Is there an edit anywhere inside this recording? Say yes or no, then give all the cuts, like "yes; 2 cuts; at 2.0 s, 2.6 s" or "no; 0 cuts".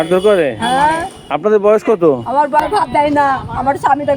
yes; 1 cut; at 2.6 s